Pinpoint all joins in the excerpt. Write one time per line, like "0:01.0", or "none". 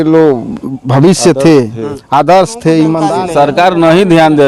0:03.2